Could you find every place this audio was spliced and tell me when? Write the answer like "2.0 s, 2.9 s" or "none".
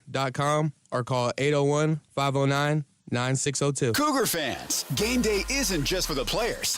3.9 s